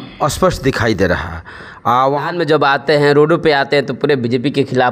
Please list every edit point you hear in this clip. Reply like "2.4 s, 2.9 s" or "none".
2.3 s